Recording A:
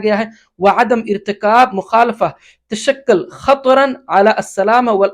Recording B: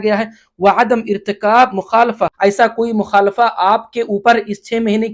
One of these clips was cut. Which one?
B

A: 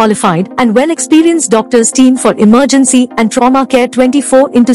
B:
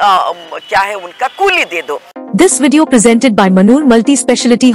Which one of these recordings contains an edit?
B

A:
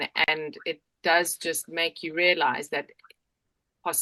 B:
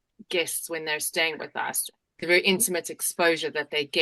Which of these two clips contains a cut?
B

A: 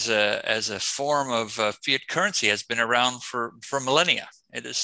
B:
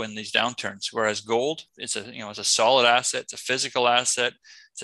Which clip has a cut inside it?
B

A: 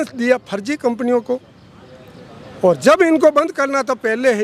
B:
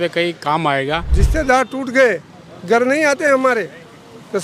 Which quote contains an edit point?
B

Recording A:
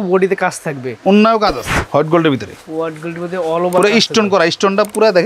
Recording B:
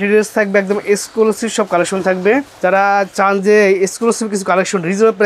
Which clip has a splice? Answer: A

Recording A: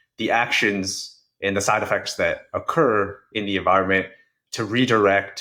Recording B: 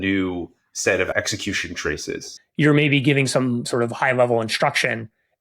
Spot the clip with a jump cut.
B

